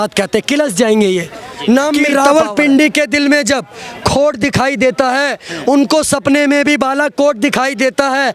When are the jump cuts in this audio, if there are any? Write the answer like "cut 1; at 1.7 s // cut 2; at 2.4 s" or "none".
cut 1; at 2.1 s